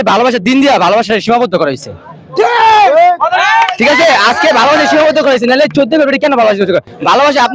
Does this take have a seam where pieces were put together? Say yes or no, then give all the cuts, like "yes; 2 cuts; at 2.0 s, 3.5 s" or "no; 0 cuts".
no; 0 cuts